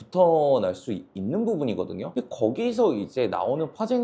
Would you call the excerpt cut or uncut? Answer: uncut